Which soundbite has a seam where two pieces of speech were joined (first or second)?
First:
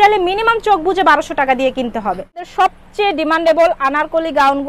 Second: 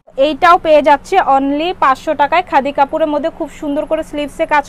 first